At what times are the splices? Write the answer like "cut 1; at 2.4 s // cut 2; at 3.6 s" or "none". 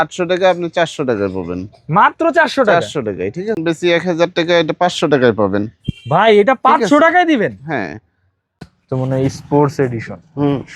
cut 1; at 3.6 s // cut 2; at 8.6 s

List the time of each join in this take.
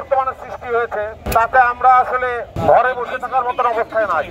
cut 1; at 1.2 s // cut 2; at 2.5 s

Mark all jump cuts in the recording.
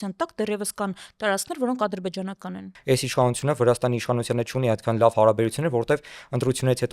cut 1; at 2.7 s

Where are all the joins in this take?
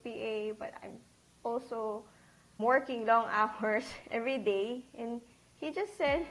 cut 1; at 2.6 s

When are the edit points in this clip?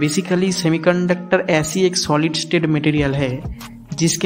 none

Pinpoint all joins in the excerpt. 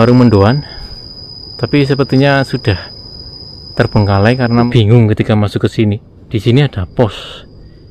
cut 1; at 4.7 s

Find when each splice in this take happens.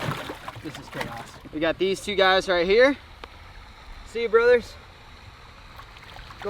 cut 1; at 1.4 s

